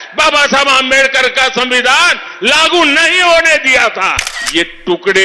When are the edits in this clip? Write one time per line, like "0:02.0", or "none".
0:04.3